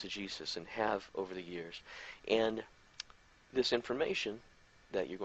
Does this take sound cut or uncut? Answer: uncut